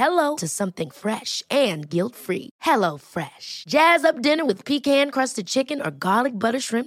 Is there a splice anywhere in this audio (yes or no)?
no